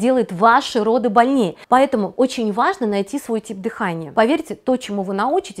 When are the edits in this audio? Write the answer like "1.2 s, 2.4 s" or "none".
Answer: 1.6 s, 4.0 s